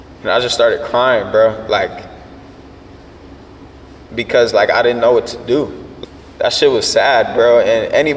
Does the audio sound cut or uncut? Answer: cut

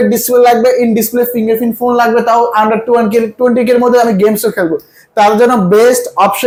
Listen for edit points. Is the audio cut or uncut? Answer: uncut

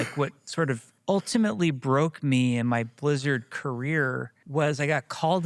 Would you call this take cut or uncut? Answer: cut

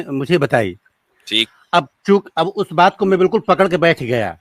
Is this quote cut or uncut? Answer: uncut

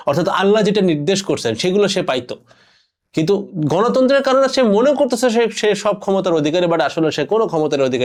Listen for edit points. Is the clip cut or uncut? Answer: uncut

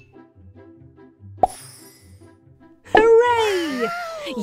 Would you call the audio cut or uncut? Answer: cut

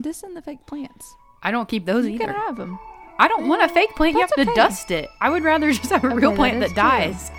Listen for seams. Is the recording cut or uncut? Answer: uncut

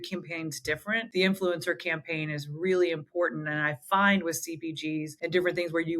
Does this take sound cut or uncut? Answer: cut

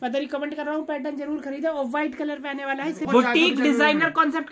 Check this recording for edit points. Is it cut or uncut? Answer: cut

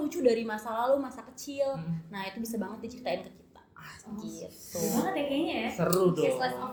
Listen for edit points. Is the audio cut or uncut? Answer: uncut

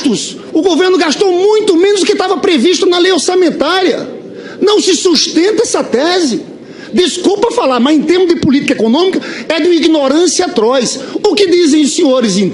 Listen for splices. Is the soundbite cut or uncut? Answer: uncut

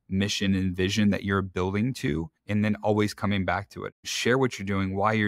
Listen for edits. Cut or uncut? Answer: cut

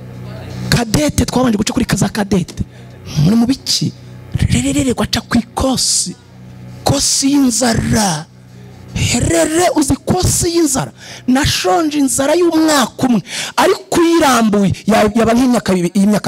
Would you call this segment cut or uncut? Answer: uncut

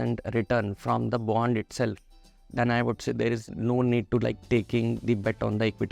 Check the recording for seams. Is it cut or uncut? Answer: uncut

